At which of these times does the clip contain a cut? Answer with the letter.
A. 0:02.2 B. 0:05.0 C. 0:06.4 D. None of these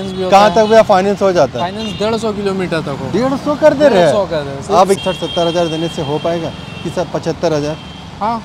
B